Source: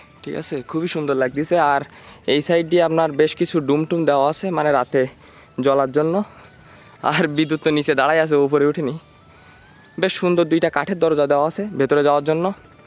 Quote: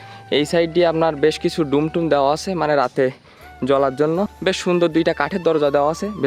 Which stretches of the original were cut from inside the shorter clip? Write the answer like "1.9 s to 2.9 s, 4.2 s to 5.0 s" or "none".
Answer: 6.3 s to 9.9 s